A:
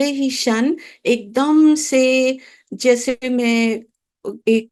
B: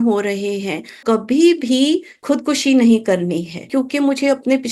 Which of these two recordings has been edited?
B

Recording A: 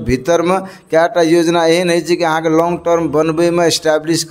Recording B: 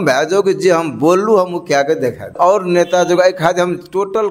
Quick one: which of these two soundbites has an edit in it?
B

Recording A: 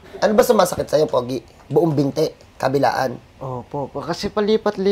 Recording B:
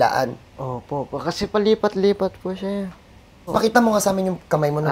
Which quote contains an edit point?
B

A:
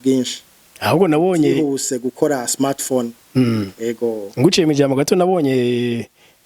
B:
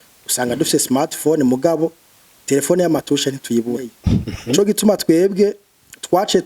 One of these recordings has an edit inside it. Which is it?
B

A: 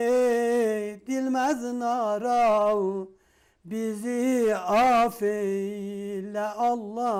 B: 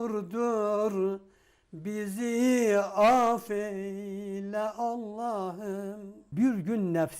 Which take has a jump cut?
B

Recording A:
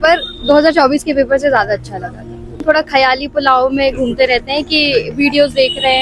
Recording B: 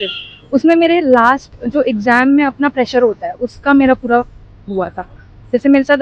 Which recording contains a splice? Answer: A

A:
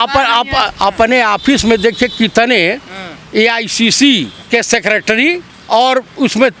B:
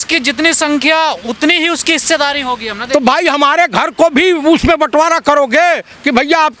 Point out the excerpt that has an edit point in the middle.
A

